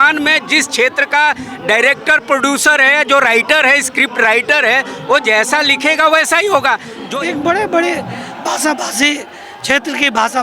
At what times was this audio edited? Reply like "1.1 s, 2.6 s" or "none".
7.0 s